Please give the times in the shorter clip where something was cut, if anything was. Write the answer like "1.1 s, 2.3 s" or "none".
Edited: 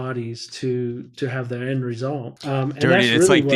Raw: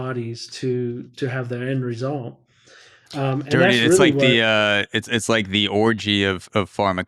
2.3 s